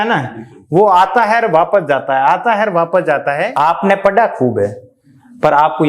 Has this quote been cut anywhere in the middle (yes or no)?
yes